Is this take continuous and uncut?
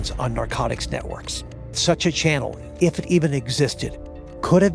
no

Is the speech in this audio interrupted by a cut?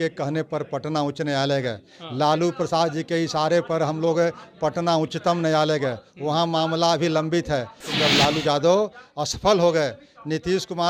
yes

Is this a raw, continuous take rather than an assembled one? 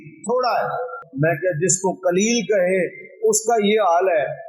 no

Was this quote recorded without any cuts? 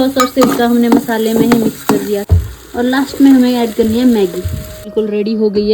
no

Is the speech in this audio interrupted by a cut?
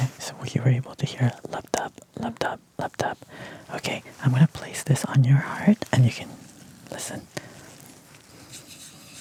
no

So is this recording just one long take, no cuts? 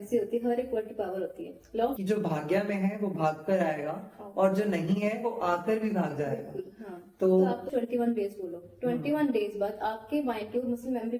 no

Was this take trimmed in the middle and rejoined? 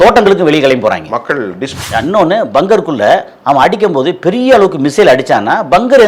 yes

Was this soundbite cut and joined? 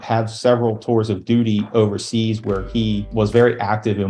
yes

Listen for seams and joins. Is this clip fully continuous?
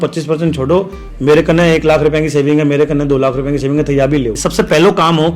no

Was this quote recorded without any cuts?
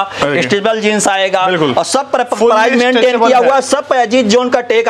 yes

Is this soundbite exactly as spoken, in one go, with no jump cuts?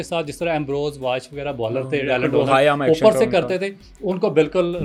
yes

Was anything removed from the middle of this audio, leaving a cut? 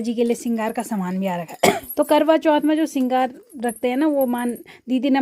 yes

